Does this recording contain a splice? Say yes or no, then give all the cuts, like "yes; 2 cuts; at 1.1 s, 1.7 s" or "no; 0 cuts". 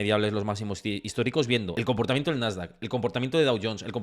yes; 1 cut; at 1.7 s